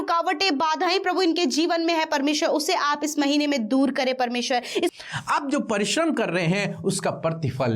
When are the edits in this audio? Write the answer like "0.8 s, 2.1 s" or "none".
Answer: 4.9 s